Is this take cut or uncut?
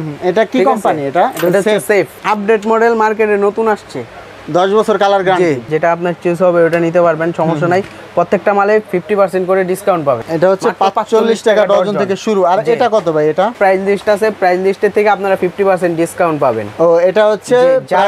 cut